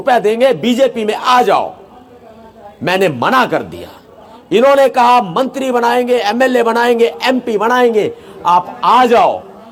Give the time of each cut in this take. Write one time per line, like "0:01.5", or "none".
none